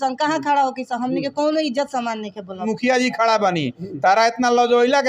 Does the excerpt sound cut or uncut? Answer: cut